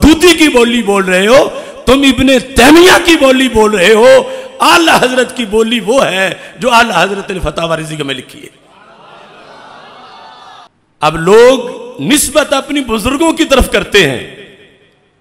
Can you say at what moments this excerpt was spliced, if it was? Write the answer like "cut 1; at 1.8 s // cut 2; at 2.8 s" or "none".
cut 1; at 10.7 s